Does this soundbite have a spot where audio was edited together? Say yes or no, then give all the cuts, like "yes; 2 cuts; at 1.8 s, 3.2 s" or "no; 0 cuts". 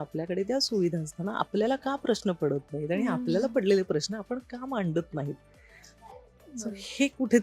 no; 0 cuts